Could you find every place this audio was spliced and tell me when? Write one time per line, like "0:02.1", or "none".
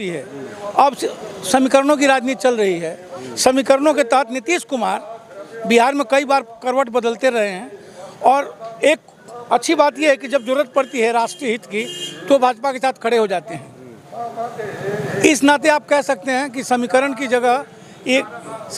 none